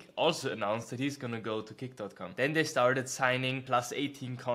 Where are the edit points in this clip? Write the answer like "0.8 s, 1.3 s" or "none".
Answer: 2.2 s, 3.6 s